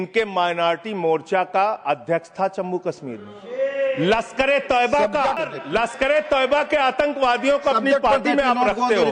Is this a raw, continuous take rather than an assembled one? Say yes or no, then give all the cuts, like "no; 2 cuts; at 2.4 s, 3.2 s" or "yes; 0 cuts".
no; 1 cut; at 5.5 s